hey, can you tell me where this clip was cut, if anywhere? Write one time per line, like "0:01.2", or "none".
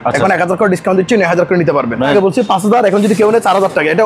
0:02.0